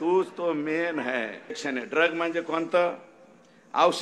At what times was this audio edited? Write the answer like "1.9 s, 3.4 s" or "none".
1.4 s